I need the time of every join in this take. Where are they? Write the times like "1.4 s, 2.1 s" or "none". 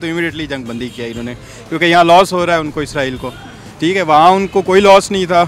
none